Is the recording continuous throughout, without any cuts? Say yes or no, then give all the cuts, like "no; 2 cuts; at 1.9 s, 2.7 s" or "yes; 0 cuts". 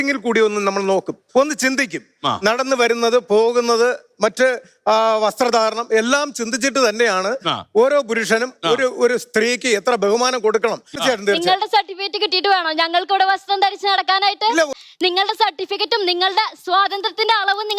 no; 2 cuts; at 11.0 s, 14.7 s